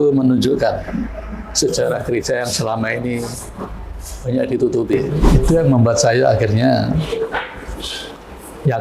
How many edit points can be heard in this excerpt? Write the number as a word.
one